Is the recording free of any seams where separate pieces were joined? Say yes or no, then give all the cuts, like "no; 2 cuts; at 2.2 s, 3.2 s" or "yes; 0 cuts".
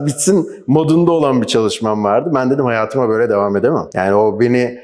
yes; 0 cuts